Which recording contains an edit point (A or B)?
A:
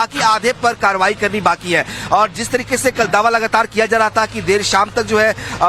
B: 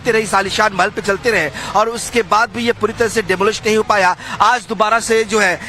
B